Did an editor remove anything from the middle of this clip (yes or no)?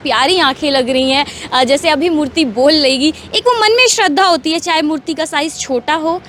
no